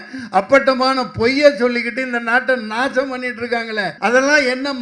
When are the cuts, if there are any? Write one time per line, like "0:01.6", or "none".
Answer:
0:03.9